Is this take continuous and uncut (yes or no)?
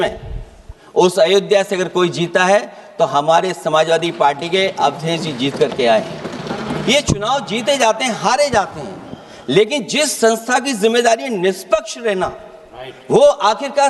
yes